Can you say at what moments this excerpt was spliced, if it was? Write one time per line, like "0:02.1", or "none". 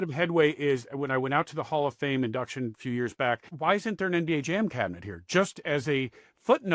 0:03.5